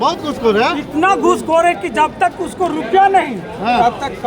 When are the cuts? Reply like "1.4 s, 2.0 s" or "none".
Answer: none